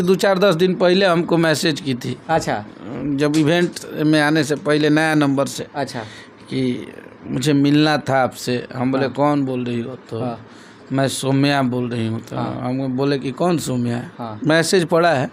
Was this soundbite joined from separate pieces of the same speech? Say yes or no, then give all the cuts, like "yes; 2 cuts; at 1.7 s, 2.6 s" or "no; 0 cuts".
no; 0 cuts